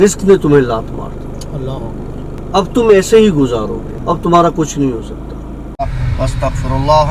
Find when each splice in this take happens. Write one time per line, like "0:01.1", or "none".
0:02.4
0:03.9
0:05.7

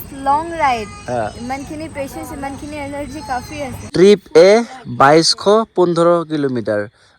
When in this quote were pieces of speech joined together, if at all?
0:03.9

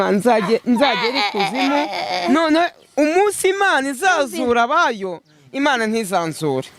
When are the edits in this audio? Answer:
none

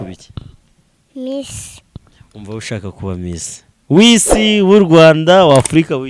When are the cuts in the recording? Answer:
none

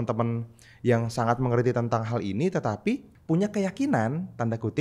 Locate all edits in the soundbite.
0:03.1

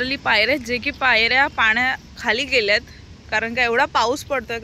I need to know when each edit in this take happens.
none

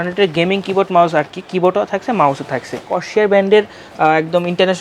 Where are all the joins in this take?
0:03.0

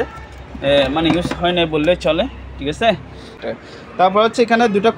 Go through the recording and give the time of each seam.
0:03.4

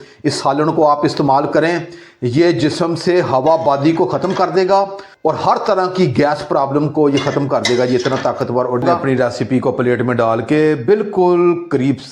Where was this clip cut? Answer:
0:08.8

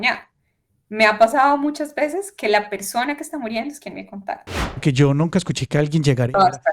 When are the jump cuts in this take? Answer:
0:04.8

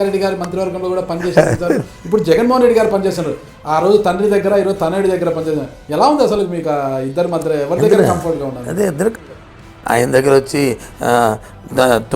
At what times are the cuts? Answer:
0:09.2

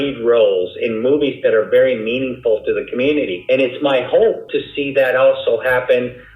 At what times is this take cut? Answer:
0:03.4
0:04.5

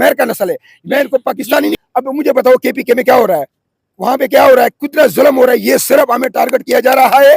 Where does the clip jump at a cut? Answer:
0:01.8

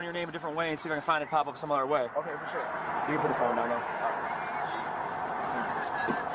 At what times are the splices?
0:01.5

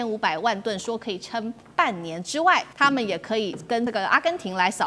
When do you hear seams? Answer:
0:02.7
0:03.9

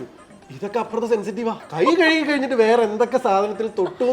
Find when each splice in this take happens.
0:01.6

